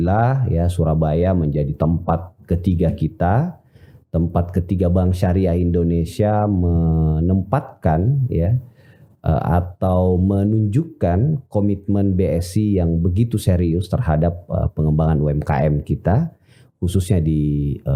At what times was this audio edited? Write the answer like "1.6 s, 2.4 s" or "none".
none

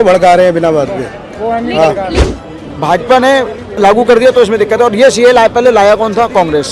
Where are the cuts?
2.3 s

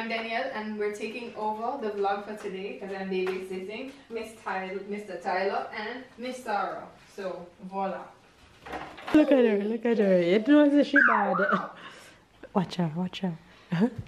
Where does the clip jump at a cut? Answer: 9.1 s

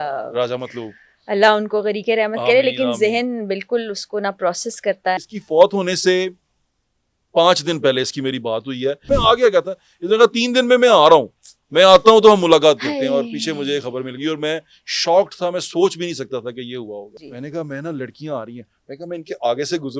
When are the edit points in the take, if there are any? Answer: 5.3 s, 9.0 s, 17.3 s

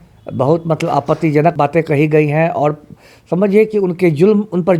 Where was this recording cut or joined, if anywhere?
1.6 s

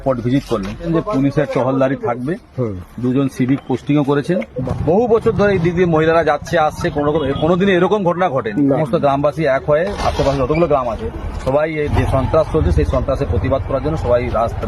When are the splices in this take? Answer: 0.8 s, 4.6 s, 8.8 s

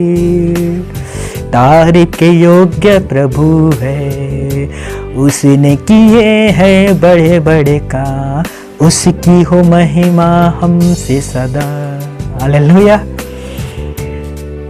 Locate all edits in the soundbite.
none

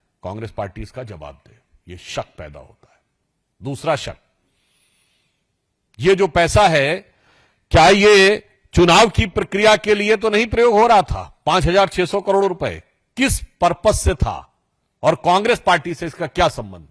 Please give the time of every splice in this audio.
none

